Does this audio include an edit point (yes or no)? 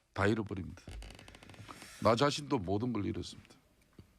yes